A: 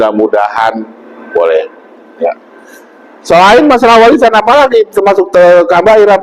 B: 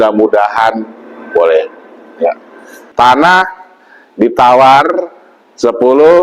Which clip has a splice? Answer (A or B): B